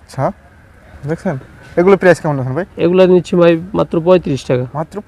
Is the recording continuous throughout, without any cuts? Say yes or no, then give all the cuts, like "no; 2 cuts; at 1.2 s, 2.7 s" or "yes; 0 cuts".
yes; 0 cuts